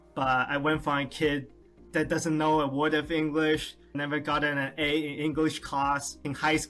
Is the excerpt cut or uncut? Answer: uncut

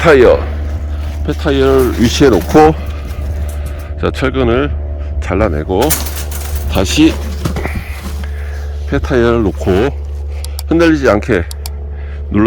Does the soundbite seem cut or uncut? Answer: uncut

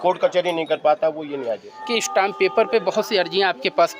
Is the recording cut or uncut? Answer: cut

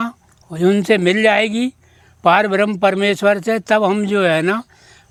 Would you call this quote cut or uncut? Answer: uncut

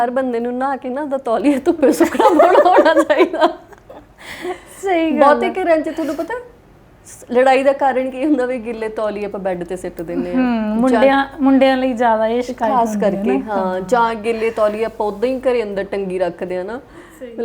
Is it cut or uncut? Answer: uncut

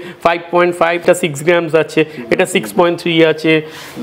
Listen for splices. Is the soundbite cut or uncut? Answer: cut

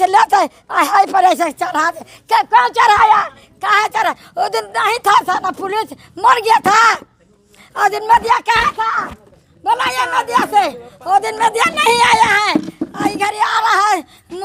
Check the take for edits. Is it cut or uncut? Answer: uncut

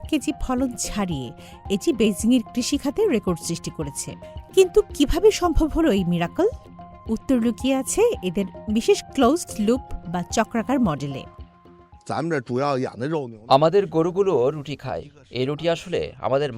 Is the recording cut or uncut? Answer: uncut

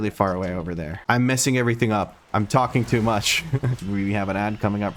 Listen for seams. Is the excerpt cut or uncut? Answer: cut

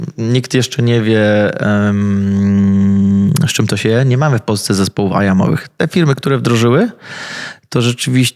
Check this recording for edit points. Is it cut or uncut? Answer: uncut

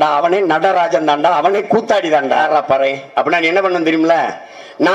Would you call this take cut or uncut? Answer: cut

